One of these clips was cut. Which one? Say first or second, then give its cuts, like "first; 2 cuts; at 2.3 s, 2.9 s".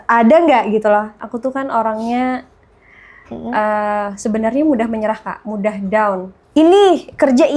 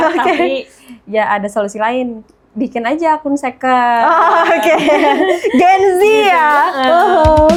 first; 2 cuts; at 1.2 s, 6.3 s